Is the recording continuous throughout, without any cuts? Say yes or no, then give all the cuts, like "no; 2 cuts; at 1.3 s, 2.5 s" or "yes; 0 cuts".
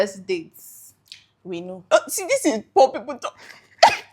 no; 1 cut; at 1.9 s